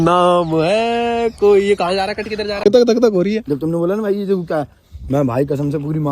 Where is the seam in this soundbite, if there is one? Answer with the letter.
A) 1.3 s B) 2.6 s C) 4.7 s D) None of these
B